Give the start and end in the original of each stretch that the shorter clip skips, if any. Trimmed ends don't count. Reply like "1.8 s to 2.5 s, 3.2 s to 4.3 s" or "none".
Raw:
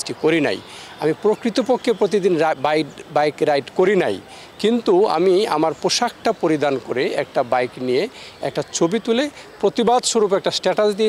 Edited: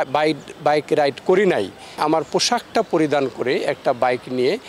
4.5 s to 5.5 s